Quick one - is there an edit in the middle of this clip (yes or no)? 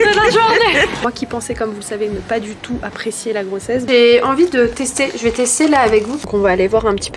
yes